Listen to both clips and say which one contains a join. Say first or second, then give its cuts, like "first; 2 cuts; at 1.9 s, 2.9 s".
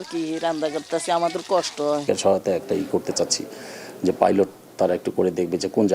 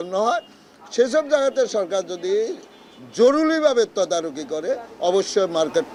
first; 1 cut; at 2.0 s